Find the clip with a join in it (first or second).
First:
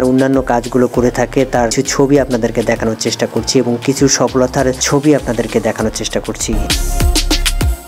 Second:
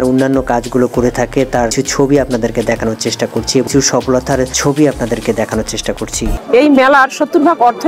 second